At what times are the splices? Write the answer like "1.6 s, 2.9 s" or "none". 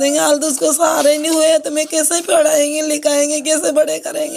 none